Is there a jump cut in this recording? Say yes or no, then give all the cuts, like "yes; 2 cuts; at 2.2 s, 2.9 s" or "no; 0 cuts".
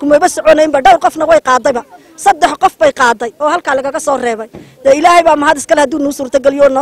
no; 0 cuts